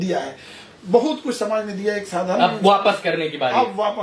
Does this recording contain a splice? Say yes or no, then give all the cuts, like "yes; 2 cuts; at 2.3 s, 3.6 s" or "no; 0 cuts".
no; 0 cuts